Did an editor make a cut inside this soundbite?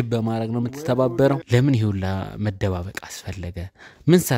yes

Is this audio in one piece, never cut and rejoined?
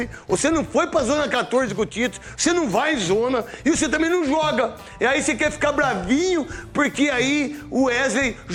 yes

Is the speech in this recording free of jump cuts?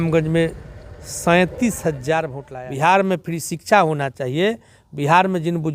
no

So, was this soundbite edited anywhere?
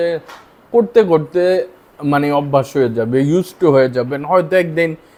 no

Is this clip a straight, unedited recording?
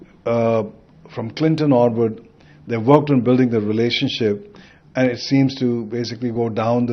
yes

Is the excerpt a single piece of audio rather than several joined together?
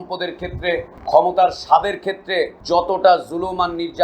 no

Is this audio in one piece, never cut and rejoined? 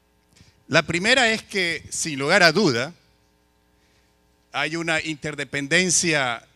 yes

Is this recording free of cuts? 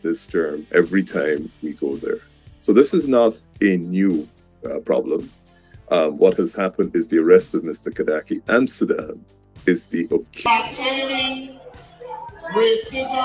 no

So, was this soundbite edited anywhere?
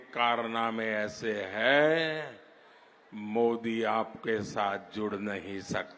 no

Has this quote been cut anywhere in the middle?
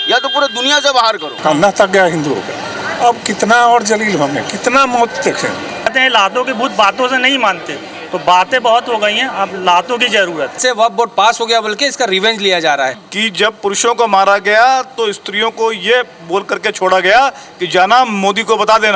yes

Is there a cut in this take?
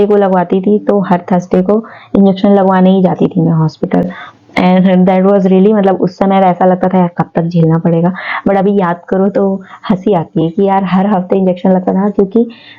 no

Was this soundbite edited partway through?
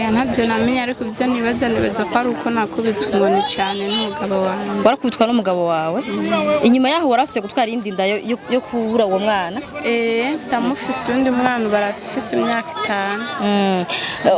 no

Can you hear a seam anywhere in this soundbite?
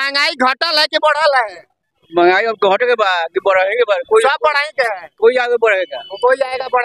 no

